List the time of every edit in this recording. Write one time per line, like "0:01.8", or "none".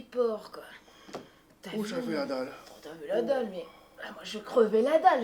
0:01.4